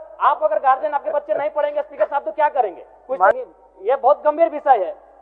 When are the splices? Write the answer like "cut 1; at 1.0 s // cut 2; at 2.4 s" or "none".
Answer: cut 1; at 3.4 s